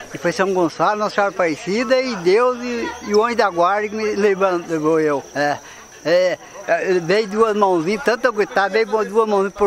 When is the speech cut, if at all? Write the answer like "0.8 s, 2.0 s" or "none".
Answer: 5.3 s